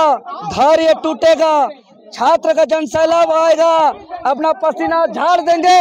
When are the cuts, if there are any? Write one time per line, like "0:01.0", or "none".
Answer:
none